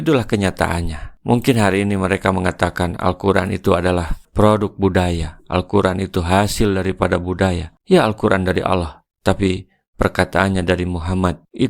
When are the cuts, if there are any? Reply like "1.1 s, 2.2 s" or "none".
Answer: none